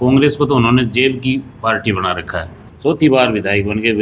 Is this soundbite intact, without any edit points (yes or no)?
no